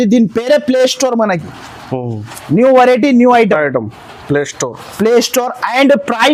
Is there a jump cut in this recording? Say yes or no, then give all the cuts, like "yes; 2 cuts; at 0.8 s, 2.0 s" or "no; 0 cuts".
no; 0 cuts